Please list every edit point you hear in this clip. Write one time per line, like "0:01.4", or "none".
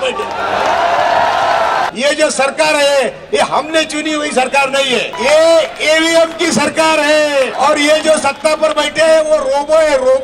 0:01.9
0:05.1
0:07.5

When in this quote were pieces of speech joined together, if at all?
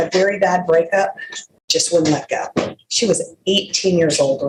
none

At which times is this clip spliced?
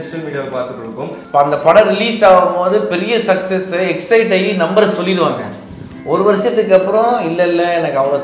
0:01.1

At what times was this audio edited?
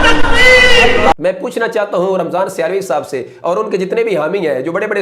0:01.2

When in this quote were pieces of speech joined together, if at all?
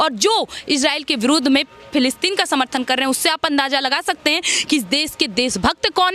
none

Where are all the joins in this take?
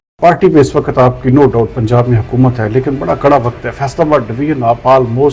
none

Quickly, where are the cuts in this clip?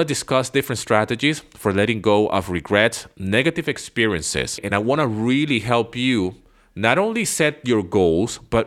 0:04.6

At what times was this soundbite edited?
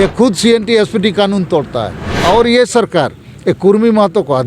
0:02.0

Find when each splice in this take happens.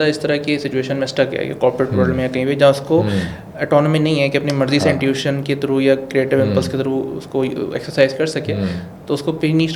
none

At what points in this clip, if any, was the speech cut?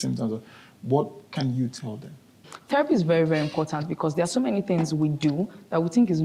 0:02.5

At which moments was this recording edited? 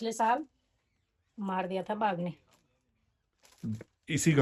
none

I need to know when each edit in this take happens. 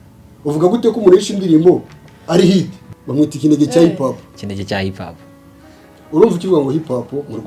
0:02.9

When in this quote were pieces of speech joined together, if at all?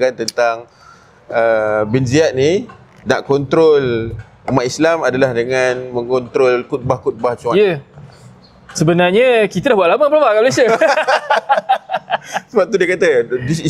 none

